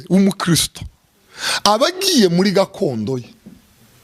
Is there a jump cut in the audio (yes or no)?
no